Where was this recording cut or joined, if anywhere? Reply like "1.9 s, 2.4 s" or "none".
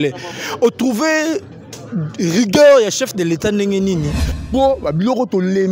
4.2 s